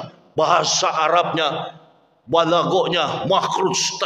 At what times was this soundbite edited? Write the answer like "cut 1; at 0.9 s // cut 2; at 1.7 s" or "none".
none

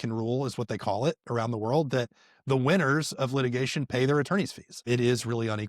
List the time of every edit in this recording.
cut 1; at 4.7 s

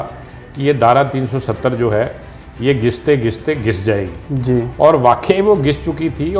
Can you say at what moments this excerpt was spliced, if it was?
none

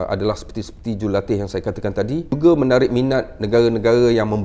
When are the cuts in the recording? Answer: cut 1; at 2.3 s

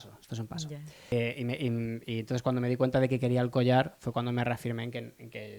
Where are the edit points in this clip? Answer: cut 1; at 1.1 s

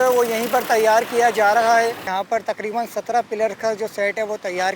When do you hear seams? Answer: cut 1; at 2.0 s

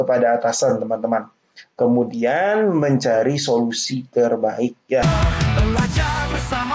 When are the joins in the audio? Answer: cut 1; at 5.0 s

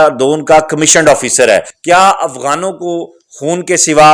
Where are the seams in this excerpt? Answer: cut 1; at 1.7 s

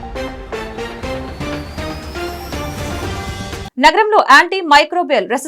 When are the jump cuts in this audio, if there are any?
cut 1; at 3.6 s

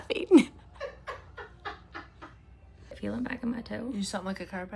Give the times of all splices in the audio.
cut 1; at 2.9 s

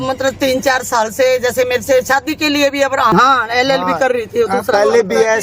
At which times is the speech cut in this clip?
cut 1; at 3.1 s

